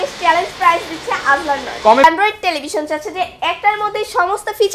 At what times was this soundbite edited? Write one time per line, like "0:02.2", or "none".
0:02.0